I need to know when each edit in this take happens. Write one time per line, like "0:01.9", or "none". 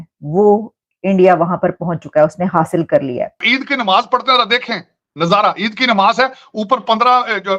0:03.4